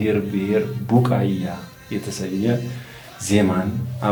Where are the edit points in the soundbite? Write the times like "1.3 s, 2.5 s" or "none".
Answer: none